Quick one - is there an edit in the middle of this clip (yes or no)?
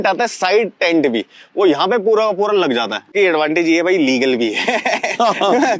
yes